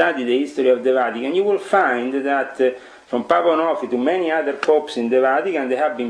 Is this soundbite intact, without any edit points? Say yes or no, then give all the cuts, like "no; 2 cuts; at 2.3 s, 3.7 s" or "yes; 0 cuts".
yes; 0 cuts